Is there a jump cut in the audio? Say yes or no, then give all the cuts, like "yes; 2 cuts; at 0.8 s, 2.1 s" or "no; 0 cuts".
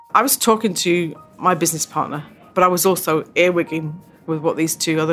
yes; 2 cuts; at 1.2 s, 2.4 s